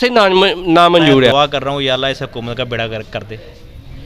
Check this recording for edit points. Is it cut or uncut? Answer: cut